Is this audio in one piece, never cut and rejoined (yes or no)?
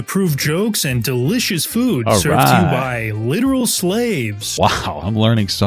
no